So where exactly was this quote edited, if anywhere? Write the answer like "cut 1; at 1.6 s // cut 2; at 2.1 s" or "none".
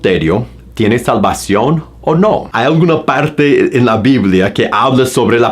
cut 1; at 2.5 s